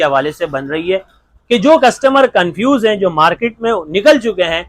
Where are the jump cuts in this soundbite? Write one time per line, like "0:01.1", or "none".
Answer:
none

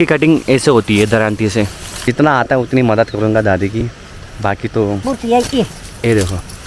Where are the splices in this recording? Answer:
0:02.0
0:05.0

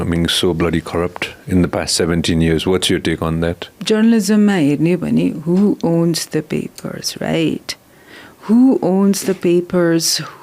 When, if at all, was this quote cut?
0:03.7

